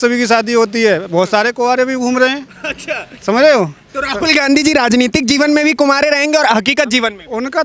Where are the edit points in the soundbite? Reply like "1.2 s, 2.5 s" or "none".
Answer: none